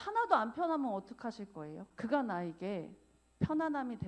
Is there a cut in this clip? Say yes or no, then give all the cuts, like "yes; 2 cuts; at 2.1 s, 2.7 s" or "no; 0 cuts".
yes; 1 cut; at 1.8 s